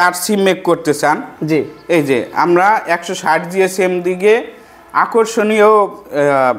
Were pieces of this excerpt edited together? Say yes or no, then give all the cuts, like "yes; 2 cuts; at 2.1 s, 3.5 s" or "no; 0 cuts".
no; 0 cuts